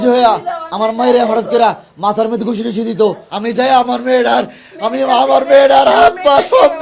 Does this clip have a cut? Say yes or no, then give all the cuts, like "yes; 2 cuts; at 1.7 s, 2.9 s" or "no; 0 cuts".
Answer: yes; 1 cut; at 3.3 s